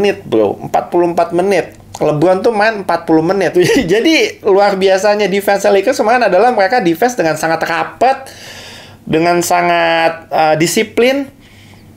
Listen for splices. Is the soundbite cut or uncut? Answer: cut